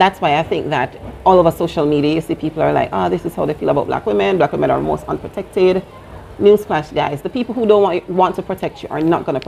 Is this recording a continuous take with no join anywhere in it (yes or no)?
no